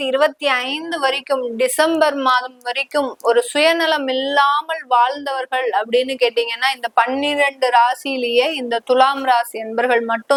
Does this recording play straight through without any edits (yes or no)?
yes